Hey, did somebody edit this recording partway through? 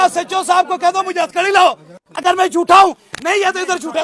no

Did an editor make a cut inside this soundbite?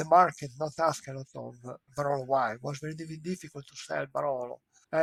no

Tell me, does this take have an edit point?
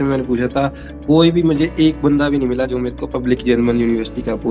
no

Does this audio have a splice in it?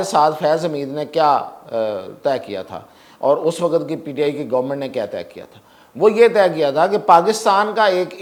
no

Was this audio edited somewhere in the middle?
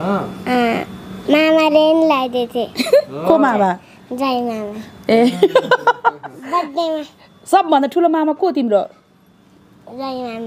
no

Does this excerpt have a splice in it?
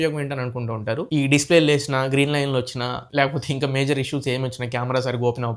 yes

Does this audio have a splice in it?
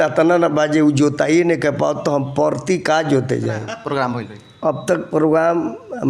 yes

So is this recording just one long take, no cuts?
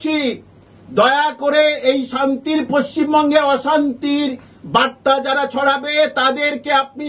yes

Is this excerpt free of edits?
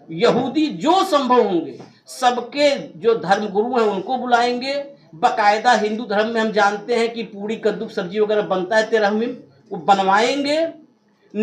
yes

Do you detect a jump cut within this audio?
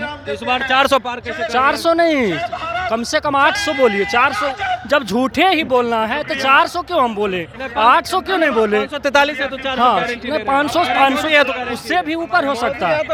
no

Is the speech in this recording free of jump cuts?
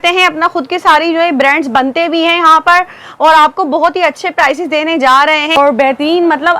no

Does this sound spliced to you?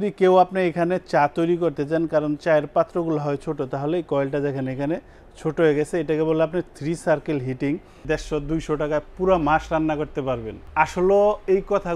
yes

